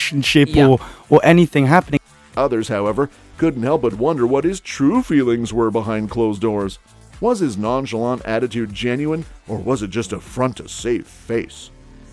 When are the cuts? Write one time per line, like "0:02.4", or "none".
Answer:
none